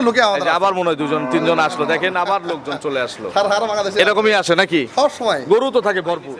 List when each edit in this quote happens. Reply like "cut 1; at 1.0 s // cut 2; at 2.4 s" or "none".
none